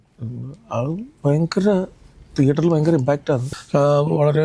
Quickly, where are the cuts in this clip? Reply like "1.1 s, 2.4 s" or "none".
3.5 s